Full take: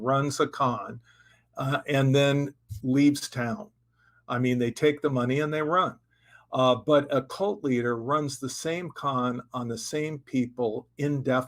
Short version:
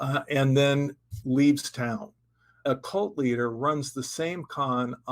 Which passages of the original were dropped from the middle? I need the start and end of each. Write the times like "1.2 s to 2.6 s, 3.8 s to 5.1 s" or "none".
4.2 s to 7.1 s